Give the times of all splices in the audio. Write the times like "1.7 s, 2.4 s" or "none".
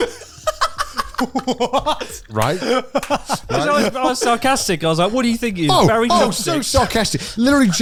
none